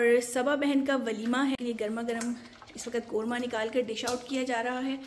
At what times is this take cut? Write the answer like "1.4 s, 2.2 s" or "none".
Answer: 1.6 s